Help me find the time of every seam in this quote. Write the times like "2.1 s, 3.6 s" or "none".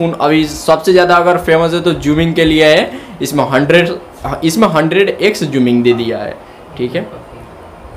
none